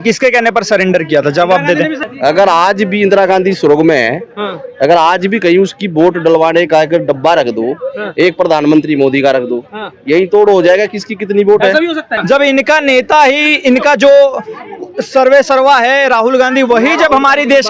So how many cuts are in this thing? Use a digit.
2